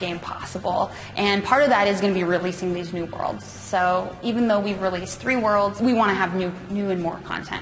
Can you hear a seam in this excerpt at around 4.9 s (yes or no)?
no